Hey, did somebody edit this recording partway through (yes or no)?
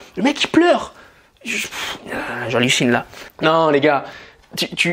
yes